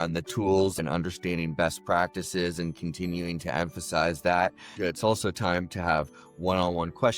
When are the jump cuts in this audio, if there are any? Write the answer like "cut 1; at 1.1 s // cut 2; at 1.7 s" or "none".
cut 1; at 0.8 s // cut 2; at 4.7 s